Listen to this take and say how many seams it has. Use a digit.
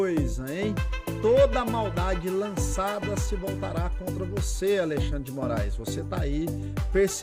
0